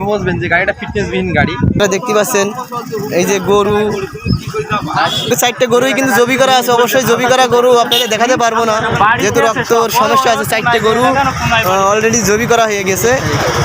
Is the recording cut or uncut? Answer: cut